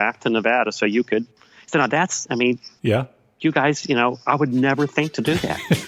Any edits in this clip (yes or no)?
no